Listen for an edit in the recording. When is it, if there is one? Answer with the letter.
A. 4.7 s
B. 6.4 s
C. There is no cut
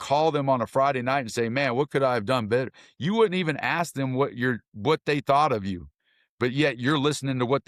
C